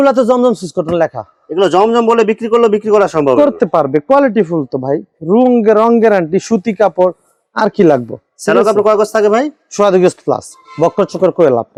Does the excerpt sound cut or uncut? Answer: uncut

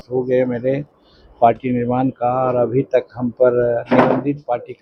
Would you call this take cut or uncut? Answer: uncut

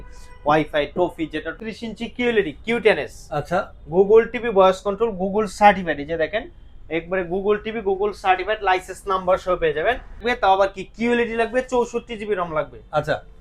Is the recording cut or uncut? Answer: cut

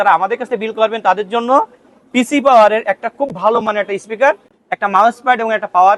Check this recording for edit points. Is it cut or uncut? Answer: uncut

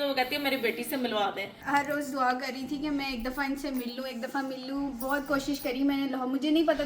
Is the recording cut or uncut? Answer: cut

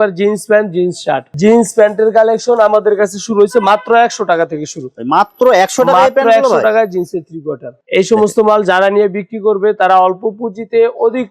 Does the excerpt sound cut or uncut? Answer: cut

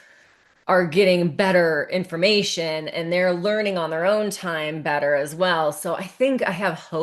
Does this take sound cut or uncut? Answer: uncut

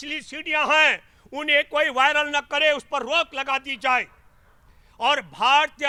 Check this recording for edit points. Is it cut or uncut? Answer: uncut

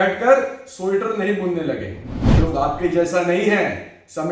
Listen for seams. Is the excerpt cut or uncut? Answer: cut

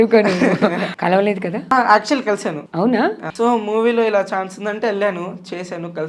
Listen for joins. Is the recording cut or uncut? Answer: cut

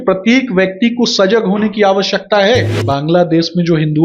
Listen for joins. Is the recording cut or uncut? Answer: cut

